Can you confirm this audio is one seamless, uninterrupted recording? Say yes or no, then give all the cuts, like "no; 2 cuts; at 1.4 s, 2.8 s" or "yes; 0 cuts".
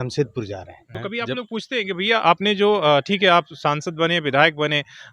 no; 1 cut; at 0.9 s